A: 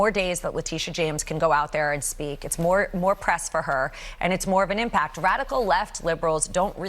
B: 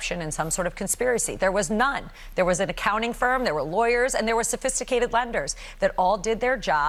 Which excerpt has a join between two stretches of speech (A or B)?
A